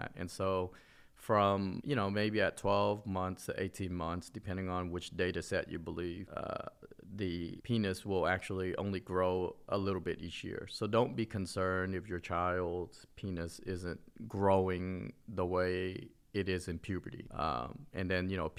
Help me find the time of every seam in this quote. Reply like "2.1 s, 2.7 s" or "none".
none